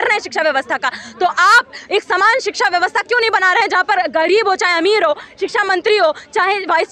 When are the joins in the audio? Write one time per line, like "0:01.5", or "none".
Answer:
none